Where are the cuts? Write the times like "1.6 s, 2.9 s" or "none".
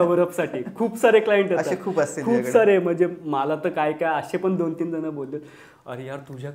none